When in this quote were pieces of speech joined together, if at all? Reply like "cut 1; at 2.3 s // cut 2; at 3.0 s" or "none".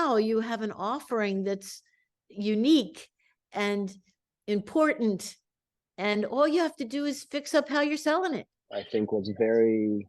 cut 1; at 8.5 s